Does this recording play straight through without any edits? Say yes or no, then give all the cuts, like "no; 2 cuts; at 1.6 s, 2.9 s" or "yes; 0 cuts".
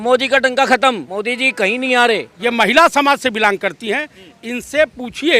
no; 2 cuts; at 1.1 s, 2.3 s